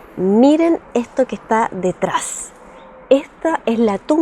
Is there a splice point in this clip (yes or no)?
no